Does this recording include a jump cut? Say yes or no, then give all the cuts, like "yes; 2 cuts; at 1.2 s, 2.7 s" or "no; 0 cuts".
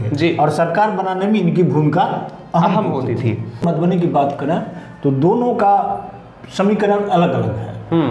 yes; 1 cut; at 3.6 s